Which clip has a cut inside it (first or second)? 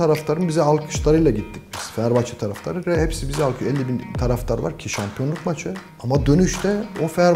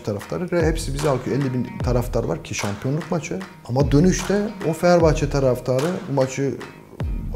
second